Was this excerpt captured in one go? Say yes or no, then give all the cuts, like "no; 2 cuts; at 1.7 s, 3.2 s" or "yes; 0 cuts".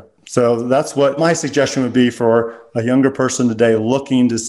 yes; 0 cuts